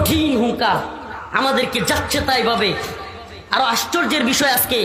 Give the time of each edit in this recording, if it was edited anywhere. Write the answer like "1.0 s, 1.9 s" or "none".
none